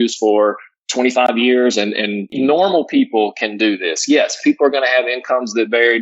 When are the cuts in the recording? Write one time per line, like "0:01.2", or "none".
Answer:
0:02.3